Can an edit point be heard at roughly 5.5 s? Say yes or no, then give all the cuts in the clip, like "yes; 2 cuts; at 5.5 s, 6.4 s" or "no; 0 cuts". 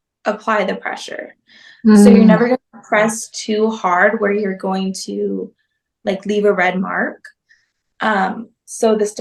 no; 0 cuts